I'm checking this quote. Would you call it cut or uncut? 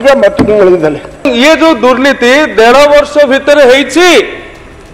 cut